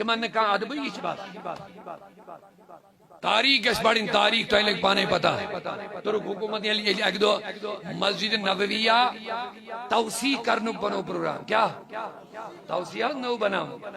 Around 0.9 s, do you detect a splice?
yes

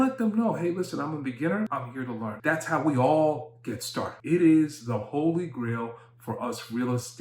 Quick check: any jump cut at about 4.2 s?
yes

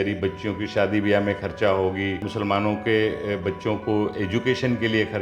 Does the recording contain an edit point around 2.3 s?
yes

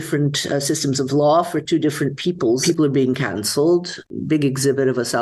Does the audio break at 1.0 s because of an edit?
no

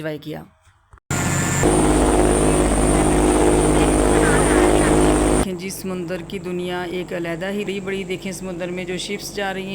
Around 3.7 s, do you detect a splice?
no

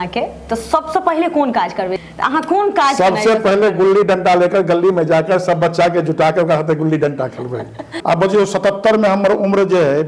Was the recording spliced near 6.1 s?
no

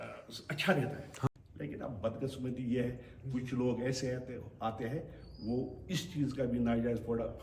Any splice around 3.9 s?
no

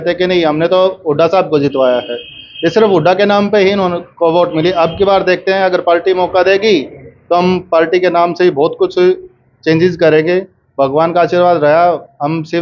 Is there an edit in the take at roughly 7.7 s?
no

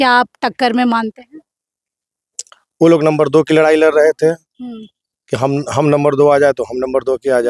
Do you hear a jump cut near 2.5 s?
no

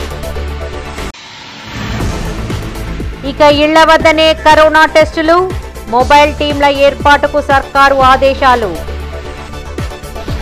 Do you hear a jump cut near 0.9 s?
yes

